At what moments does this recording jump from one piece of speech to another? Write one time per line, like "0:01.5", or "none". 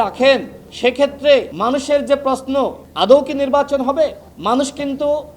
0:01.5
0:02.8